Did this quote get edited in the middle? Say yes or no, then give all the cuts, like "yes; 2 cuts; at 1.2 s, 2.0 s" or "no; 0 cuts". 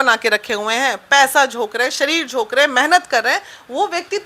no; 0 cuts